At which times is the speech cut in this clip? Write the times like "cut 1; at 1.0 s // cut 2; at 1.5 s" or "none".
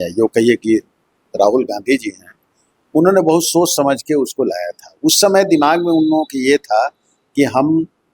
none